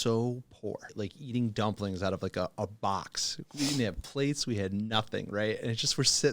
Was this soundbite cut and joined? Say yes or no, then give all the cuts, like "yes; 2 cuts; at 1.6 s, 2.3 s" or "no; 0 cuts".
yes; 1 cut; at 0.9 s